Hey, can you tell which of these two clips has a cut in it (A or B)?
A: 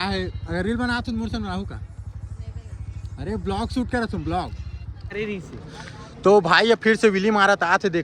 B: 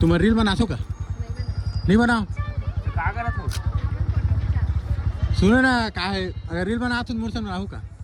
A